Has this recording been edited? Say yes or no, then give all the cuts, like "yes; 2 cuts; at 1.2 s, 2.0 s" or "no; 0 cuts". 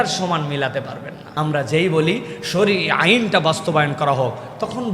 yes; 1 cut; at 1.2 s